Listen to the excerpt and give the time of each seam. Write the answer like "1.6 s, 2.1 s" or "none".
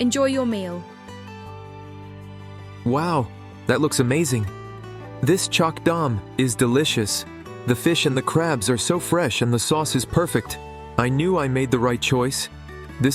1.3 s, 2.8 s

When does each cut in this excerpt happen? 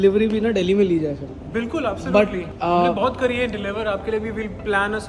2.5 s

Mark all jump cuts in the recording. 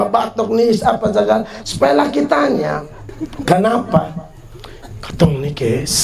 3.3 s

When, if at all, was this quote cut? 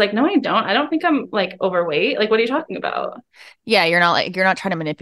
none

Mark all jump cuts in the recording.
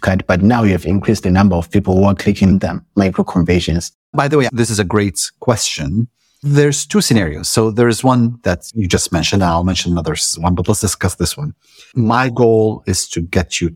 3.9 s, 8.7 s

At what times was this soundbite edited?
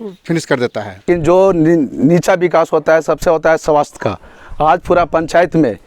1.0 s

